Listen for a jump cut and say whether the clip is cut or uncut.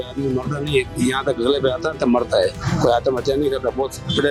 uncut